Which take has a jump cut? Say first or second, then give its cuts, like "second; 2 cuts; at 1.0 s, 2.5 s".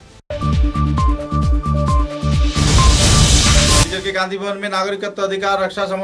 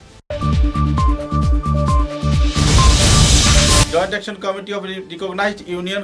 second; 1 cut; at 3.8 s